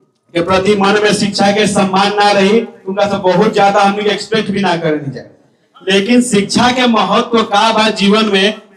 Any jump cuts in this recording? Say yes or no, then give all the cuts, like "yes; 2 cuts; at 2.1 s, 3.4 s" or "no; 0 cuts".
no; 0 cuts